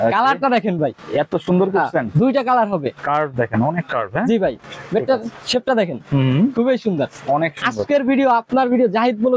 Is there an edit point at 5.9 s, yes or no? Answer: no